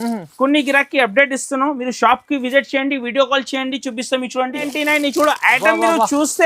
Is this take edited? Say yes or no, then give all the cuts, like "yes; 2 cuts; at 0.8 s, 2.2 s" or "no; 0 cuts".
yes; 1 cut; at 4.6 s